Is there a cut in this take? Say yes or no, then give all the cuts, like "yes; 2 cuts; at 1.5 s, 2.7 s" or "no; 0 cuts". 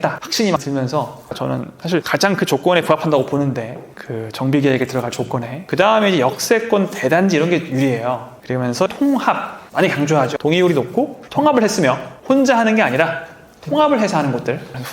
yes; 1 cut; at 5.6 s